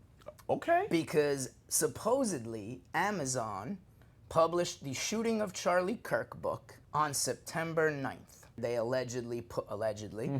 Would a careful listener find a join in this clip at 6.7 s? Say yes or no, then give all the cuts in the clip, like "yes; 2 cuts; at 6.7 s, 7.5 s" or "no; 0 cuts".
yes; 2 cuts; at 6.7 s, 8.6 s